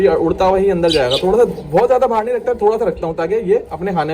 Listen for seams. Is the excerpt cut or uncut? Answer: uncut